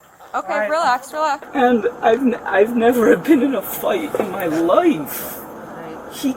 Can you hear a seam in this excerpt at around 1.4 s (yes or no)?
yes